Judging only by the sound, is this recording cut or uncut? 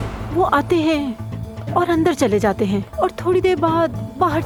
uncut